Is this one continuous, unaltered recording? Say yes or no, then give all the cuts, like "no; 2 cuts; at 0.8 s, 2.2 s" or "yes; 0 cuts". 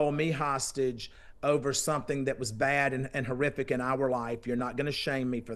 yes; 0 cuts